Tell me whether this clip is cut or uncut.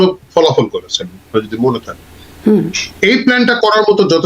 uncut